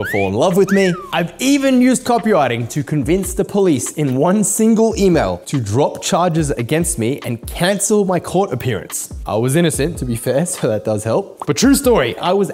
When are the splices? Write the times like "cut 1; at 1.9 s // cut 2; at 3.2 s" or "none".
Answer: none